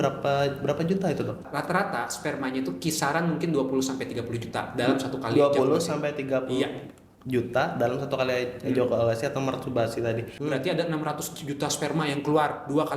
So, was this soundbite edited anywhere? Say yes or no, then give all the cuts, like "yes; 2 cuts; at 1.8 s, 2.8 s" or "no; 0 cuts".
yes; 2 cuts; at 1.4 s, 10.3 s